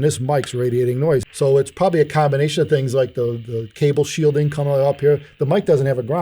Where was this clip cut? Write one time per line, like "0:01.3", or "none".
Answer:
0:01.3